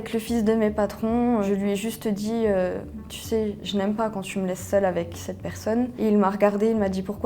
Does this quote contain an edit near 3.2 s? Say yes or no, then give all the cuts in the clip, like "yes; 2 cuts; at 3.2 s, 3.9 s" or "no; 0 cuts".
no; 2 cuts; at 1.5 s, 5.9 s